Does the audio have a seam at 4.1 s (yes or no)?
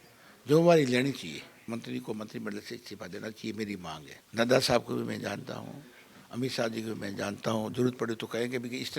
yes